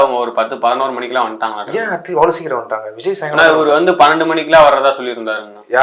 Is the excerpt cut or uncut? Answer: uncut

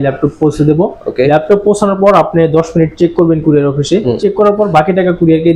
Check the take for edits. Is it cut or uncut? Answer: uncut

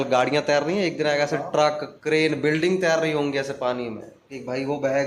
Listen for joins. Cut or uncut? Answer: uncut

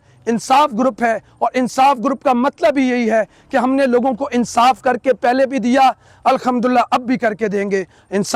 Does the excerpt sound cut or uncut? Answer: uncut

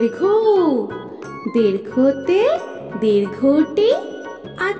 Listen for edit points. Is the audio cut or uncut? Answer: uncut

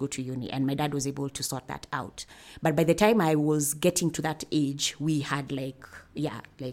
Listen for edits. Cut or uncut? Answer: uncut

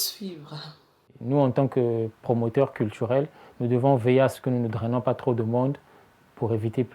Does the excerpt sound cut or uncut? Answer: cut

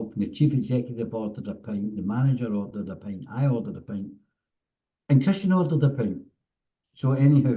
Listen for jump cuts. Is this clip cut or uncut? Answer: uncut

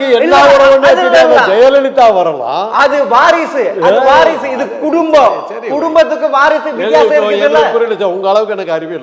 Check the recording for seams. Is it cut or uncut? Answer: uncut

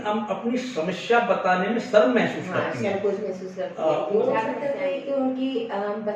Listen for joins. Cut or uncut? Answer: cut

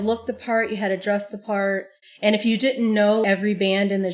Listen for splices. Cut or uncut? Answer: cut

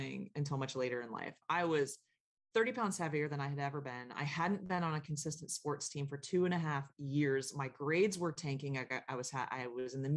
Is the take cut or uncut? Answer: uncut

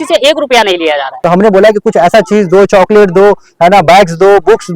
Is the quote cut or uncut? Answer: cut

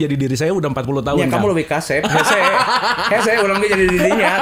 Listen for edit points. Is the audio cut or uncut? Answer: uncut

